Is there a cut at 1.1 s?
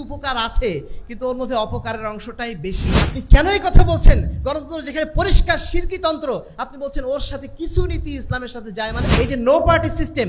no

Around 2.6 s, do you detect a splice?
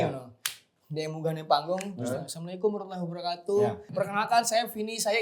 no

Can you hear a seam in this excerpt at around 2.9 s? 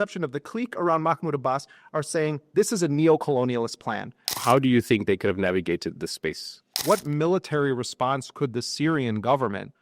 no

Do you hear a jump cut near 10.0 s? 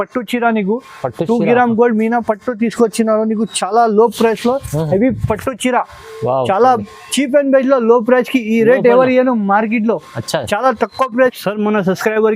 no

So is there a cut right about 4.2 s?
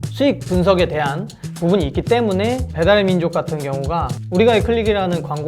yes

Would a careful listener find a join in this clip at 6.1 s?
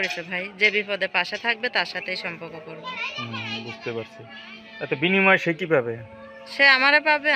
no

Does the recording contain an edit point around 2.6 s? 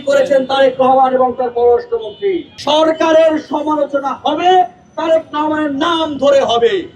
yes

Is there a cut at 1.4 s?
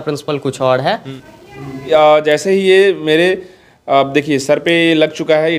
yes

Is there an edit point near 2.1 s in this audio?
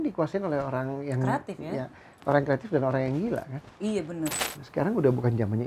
no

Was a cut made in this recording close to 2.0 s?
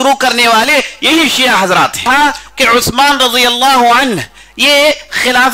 yes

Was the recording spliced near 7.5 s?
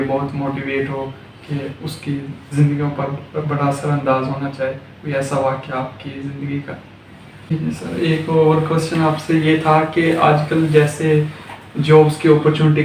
yes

